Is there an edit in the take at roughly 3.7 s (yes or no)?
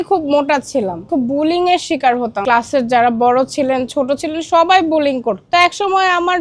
no